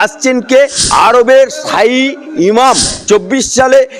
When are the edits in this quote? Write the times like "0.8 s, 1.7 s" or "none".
1.1 s, 2.9 s